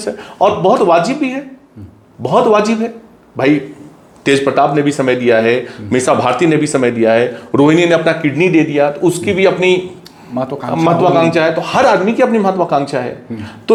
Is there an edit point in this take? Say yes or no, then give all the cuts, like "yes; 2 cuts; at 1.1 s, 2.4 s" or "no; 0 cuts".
no; 0 cuts